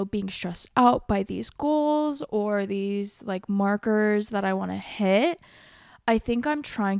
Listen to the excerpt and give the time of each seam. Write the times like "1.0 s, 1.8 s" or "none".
none